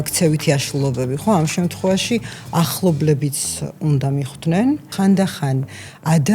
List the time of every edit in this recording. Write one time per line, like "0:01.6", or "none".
0:04.9